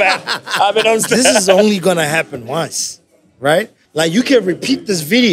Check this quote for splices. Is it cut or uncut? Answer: cut